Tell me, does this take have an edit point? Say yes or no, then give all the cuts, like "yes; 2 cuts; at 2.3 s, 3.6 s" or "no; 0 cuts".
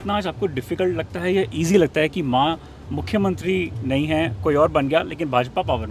no; 0 cuts